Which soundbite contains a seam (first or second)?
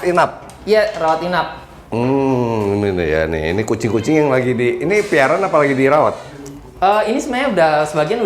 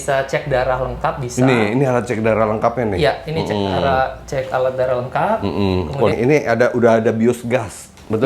second